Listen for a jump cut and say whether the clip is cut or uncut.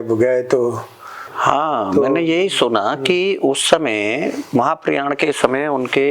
cut